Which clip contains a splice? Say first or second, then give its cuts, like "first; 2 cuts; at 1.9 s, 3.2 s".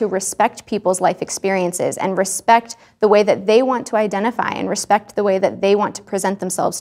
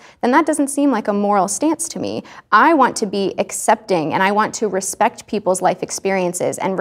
second; 1 cut; at 2.3 s